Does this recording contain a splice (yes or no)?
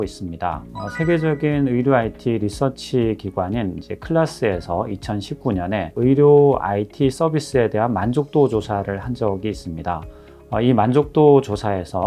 no